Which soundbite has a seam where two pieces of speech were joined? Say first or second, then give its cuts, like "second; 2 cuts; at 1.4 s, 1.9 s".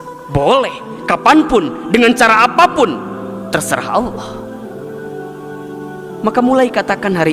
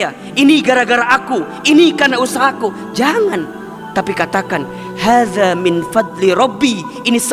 first; 2 cuts; at 4.6 s, 6.1 s